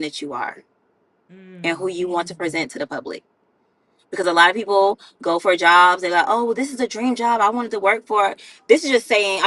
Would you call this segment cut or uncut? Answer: uncut